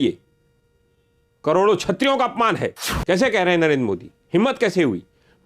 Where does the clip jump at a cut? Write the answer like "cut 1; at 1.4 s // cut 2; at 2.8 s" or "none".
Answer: cut 1; at 2.9 s